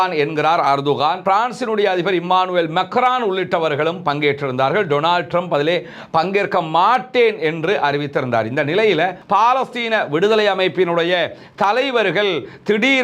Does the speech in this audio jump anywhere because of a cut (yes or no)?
yes